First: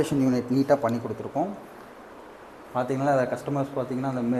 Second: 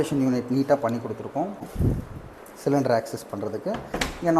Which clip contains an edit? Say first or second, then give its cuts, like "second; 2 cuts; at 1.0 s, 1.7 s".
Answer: second; 1 cut; at 1.7 s